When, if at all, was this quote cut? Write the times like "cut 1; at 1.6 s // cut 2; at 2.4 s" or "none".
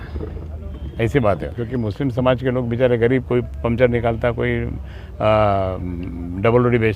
cut 1; at 1.6 s